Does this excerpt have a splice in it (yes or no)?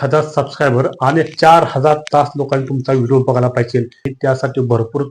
yes